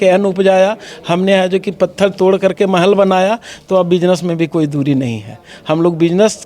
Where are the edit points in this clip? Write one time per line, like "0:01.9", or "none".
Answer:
none